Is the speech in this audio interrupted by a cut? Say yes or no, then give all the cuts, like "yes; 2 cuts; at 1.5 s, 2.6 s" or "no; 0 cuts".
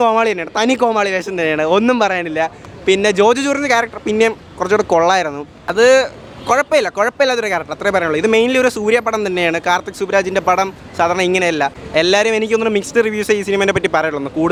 no; 0 cuts